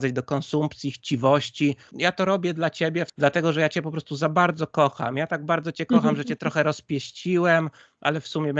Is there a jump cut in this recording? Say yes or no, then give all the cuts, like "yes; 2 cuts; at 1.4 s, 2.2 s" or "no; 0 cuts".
yes; 2 cuts; at 1.9 s, 3.1 s